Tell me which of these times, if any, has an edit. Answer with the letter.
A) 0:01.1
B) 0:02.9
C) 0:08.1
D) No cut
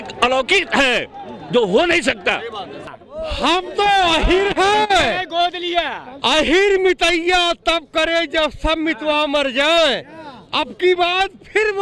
B